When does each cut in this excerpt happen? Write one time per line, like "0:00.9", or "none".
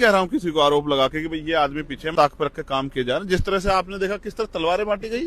0:02.1